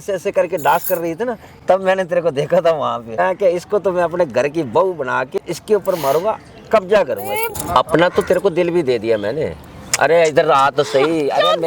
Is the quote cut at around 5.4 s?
yes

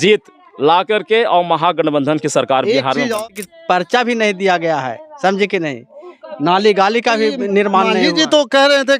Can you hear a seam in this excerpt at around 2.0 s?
no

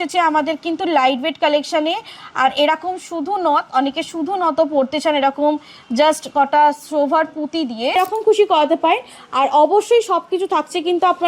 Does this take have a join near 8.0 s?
yes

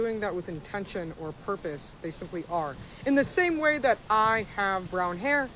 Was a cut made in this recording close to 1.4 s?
yes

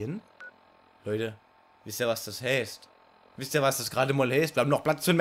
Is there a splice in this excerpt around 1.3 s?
no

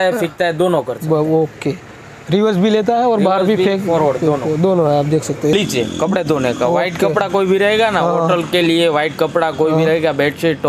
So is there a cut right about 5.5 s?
yes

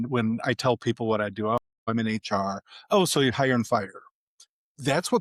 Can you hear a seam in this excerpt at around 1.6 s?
no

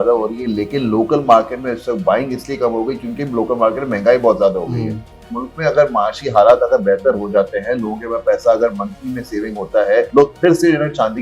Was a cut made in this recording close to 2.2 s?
no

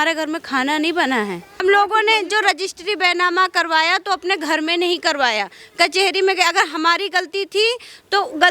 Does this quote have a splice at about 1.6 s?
yes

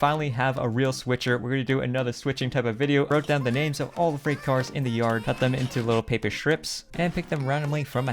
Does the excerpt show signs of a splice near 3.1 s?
yes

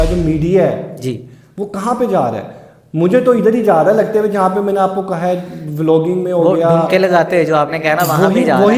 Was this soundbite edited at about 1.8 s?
no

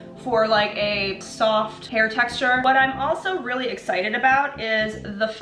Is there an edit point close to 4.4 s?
no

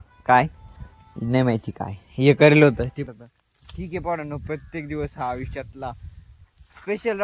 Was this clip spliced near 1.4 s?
no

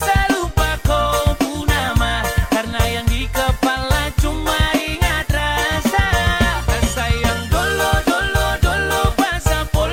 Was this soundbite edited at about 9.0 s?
no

